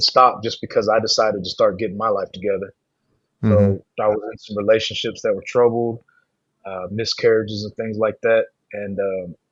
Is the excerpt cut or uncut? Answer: uncut